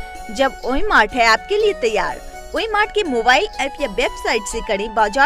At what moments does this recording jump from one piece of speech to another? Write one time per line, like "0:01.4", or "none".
none